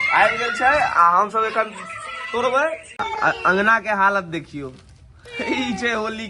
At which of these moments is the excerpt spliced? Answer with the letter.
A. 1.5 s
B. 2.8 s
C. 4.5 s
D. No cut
B